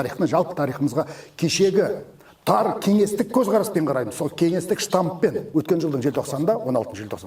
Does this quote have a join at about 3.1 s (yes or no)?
no